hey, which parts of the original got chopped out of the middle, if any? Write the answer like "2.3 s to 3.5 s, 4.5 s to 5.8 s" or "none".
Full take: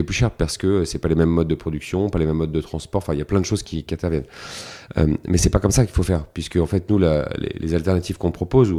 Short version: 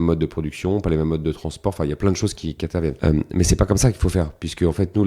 4.2 s to 4.9 s